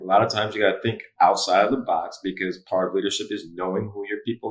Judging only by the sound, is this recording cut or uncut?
uncut